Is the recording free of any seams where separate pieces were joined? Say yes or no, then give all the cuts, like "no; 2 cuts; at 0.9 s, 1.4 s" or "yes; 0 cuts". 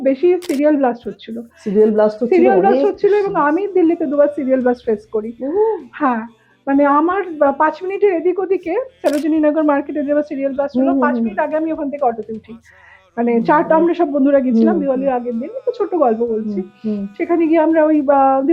yes; 0 cuts